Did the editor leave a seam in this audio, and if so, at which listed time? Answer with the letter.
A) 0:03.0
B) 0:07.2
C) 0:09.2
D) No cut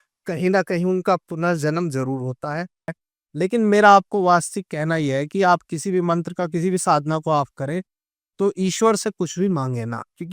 A